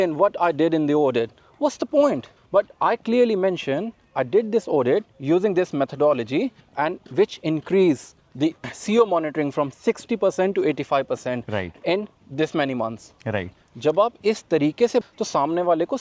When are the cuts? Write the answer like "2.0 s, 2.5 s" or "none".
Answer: none